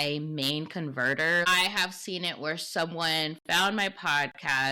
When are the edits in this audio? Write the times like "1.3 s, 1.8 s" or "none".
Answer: 1.4 s

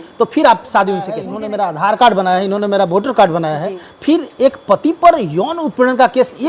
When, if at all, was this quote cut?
1.3 s

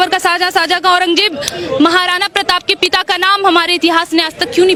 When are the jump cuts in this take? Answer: none

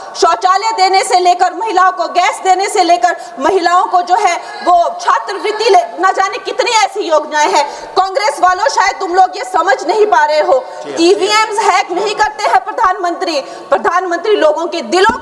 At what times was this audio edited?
none

